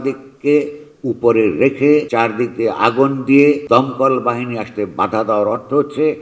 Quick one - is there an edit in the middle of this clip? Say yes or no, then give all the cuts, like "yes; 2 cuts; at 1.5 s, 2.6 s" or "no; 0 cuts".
yes; 2 cuts; at 2.1 s, 3.6 s